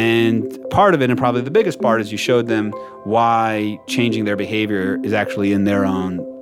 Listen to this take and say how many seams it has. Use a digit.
0